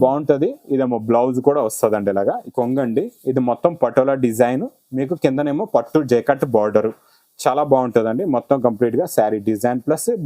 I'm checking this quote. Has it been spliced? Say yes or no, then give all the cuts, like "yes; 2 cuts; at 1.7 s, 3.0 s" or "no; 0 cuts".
yes; 1 cut; at 2.5 s